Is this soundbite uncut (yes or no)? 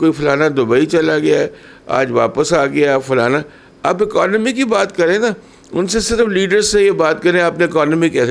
yes